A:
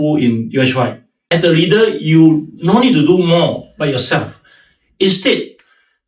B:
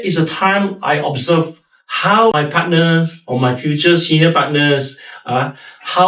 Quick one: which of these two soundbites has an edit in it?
A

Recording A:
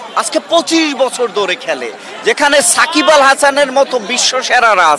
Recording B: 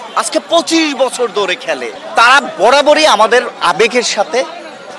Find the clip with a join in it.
B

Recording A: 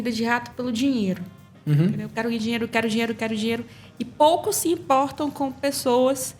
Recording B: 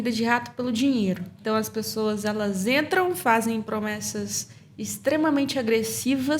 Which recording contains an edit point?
B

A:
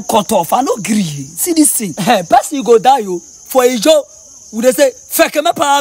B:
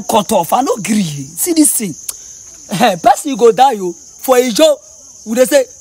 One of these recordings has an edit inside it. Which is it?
A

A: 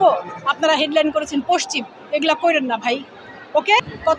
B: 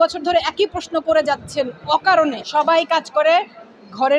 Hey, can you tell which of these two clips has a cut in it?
B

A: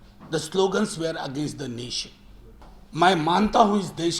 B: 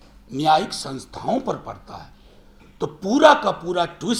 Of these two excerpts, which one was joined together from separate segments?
A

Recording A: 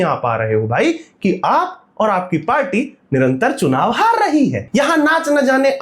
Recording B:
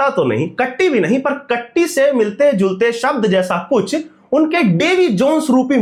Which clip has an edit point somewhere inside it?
A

